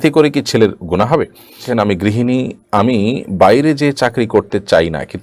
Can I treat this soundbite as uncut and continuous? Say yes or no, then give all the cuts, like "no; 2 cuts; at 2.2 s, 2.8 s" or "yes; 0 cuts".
no; 1 cut; at 1.7 s